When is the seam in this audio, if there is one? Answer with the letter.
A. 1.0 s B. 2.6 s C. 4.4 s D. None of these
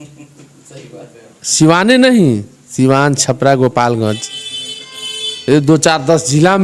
D